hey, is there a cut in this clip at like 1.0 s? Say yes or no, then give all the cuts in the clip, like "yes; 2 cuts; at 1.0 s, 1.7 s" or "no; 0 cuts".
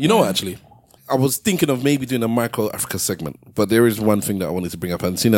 yes; 1 cut; at 1.0 s